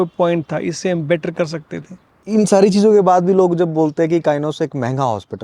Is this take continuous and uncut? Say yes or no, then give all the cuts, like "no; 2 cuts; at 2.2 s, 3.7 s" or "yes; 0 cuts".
no; 1 cut; at 2.3 s